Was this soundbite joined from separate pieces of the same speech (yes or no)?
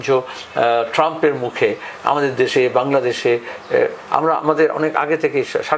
no